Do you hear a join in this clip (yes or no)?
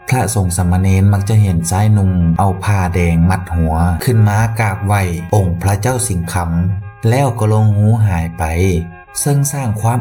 no